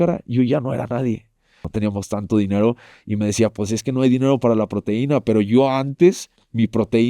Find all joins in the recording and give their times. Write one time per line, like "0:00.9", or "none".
0:01.7